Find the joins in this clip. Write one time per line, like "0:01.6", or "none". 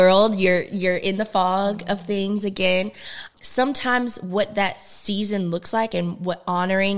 none